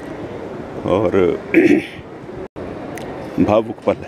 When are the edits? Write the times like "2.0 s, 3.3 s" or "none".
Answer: 2.7 s